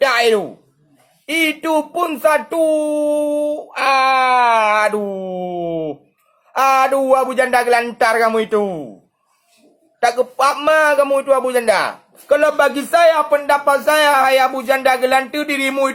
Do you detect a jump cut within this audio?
no; 0 cuts

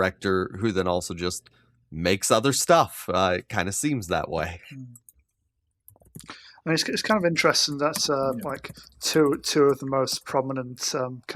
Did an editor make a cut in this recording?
no; 0 cuts

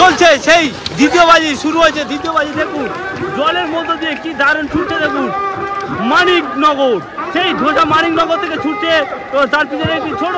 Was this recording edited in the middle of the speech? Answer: no; 0 cuts

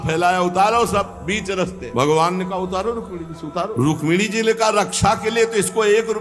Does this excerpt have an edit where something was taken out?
yes; 2 cuts; at 1.8 s, 3.7 s

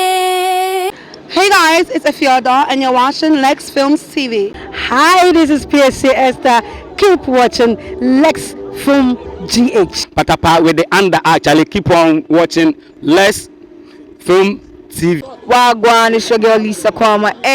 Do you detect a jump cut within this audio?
yes; 3 cuts; at 0.9 s, 4.6 s, 10.0 s

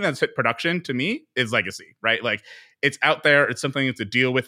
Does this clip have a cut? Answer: no; 0 cuts

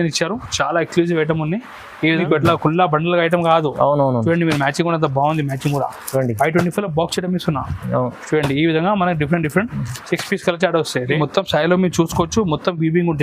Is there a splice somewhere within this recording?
yes; 2 cuts; at 2.2 s, 11.2 s

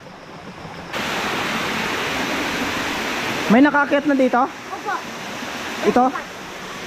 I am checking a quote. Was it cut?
yes; 1 cut; at 0.9 s

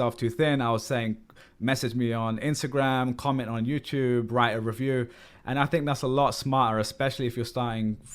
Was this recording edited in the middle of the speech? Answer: yes; 1 cut; at 5.3 s

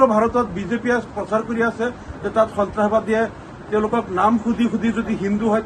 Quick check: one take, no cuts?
yes; 0 cuts

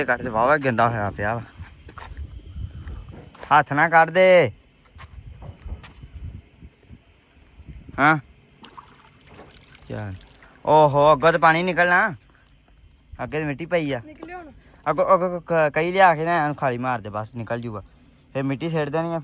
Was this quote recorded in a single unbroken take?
yes; 0 cuts

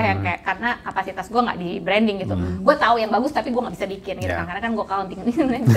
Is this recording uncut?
yes; 0 cuts

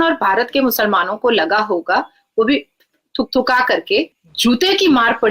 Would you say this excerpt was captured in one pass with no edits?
no; 1 cut; at 4.2 s

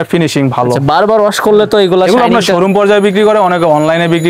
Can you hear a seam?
no; 0 cuts

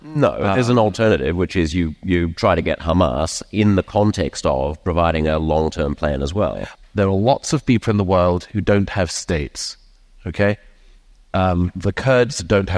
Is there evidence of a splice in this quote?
yes; 1 cut; at 6.7 s

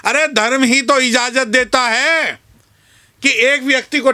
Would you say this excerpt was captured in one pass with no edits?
yes; 0 cuts

